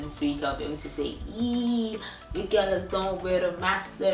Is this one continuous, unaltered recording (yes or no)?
yes